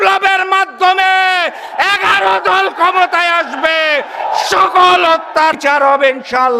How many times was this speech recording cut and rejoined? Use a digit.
1